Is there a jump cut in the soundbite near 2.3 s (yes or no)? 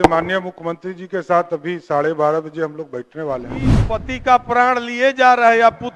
no